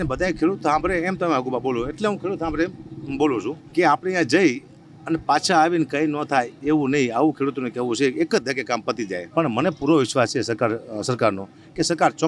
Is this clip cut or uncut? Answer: cut